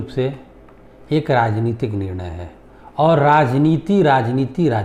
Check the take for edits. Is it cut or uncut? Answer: uncut